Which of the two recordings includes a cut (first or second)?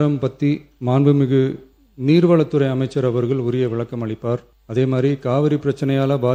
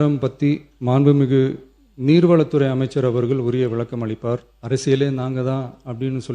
second